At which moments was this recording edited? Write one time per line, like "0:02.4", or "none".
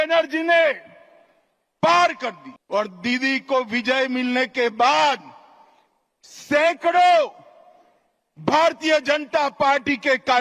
0:02.5

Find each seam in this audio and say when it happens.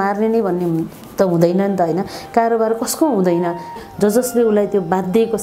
0:03.8

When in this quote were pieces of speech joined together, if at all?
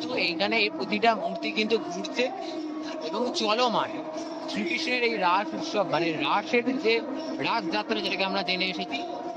none

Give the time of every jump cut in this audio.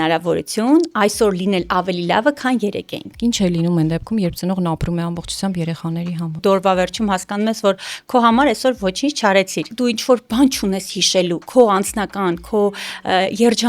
0:03.1
0:06.4
0:09.6

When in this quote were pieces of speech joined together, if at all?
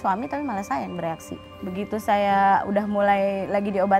0:01.4

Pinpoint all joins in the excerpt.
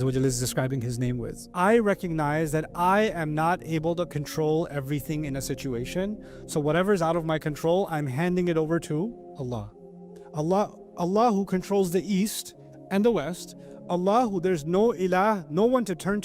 0:01.5

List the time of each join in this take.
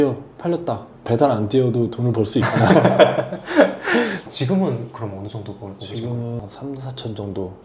0:04.2
0:06.4

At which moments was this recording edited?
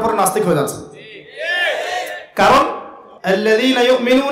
0:03.2

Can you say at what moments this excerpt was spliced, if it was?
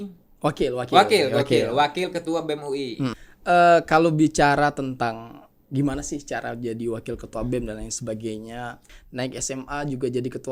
0:03.2
0:08.8

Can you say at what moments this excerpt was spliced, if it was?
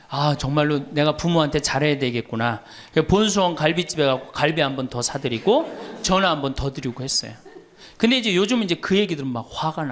none

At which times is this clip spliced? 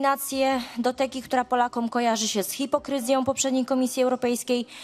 none

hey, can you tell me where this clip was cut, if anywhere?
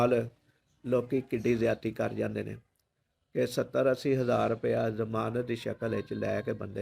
none

